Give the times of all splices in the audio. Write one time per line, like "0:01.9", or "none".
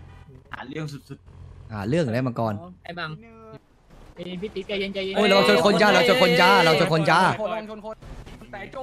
0:03.6